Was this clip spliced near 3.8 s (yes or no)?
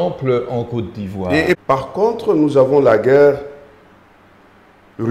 no